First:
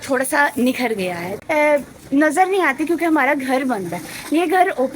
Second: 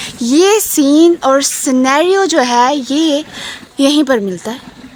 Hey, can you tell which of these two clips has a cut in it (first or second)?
first